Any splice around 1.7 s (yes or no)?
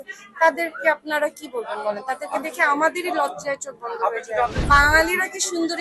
no